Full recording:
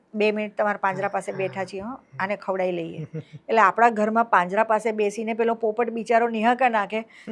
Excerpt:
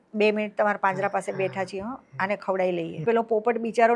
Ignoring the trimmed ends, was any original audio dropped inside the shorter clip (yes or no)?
yes